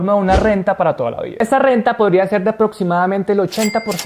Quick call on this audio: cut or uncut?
cut